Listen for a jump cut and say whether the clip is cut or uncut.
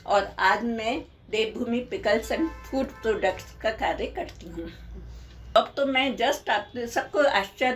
cut